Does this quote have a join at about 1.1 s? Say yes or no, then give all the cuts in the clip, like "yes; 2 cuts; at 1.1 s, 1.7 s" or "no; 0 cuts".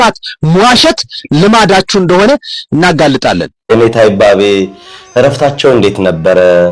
no; 1 cut; at 3.5 s